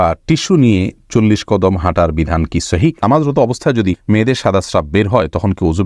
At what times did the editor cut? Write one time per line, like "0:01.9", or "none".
0:03.0
0:04.0